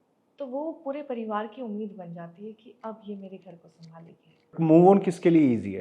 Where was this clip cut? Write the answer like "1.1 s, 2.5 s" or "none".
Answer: 4.5 s